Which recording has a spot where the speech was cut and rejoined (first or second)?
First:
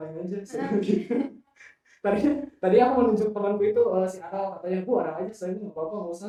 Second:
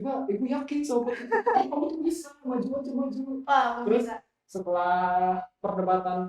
second